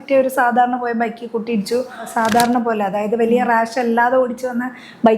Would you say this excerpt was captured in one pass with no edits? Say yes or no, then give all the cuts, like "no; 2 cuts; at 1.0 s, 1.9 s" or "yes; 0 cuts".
no; 1 cut; at 2.1 s